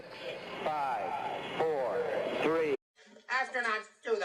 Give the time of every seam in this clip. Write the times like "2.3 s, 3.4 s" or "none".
none